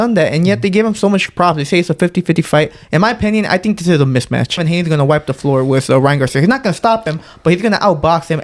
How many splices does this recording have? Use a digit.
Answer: 1